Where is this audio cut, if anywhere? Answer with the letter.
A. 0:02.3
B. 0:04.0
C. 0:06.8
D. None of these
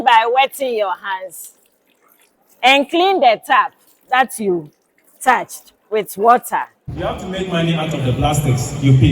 C